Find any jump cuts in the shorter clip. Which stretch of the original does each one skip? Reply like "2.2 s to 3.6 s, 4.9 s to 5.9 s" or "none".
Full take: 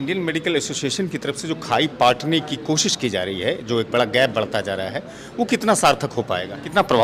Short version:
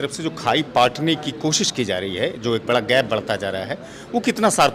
none